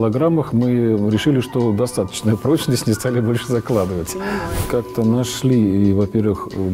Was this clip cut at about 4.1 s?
yes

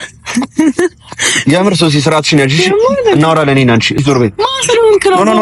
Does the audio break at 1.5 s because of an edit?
no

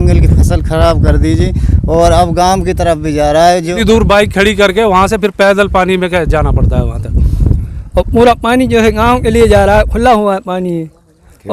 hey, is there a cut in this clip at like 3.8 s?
yes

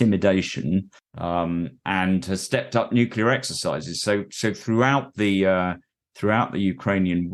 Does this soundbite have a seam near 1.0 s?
yes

